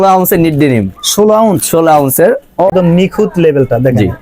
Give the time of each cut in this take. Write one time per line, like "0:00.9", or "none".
0:02.7